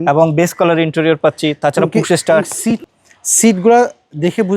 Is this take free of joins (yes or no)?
no